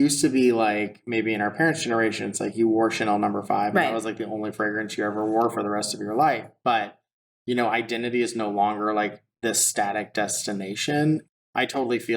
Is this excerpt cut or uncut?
cut